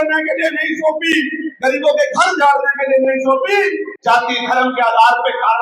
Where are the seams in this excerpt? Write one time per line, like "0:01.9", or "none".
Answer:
0:03.9

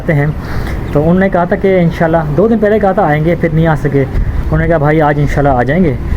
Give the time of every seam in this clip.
0:04.2

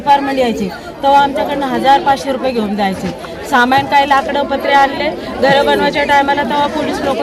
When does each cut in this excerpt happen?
none

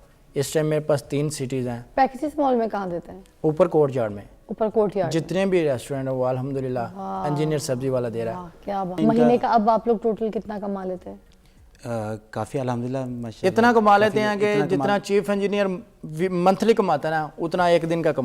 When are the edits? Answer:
0:09.0

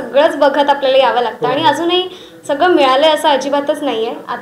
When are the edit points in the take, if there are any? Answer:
none

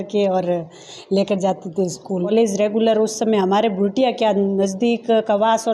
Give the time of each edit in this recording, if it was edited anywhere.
0:02.3

